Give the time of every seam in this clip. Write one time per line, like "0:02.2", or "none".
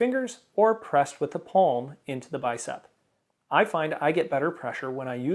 none